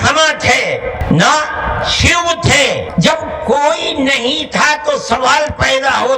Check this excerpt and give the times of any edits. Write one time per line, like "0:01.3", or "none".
0:01.0
0:02.9